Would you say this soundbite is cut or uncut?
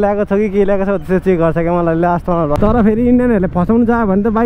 cut